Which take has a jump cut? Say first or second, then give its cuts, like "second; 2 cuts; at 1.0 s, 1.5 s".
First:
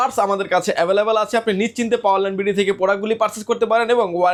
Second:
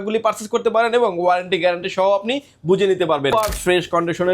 second; 1 cut; at 3.3 s